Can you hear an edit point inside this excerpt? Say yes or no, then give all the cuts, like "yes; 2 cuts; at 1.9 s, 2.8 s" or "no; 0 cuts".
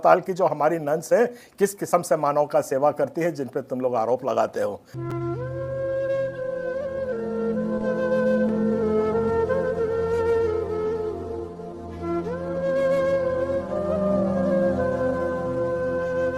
no; 0 cuts